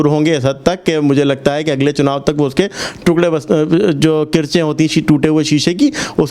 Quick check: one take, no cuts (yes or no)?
yes